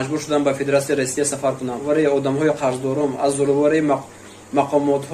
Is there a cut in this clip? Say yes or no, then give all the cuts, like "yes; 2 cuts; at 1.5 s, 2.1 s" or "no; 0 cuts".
yes; 1 cut; at 1.8 s